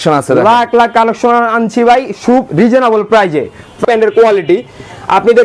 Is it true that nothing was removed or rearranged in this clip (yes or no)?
no